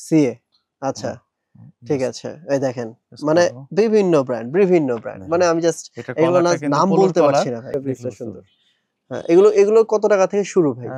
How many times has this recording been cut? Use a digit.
1